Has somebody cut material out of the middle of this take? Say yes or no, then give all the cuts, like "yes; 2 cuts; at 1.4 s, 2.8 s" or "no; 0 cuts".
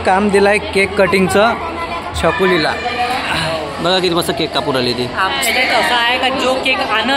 no; 0 cuts